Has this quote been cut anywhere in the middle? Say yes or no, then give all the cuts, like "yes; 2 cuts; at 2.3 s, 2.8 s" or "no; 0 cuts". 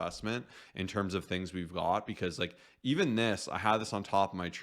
no; 0 cuts